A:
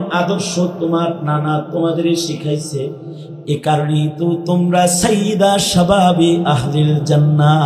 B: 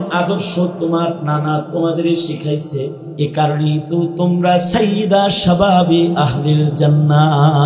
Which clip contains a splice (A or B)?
B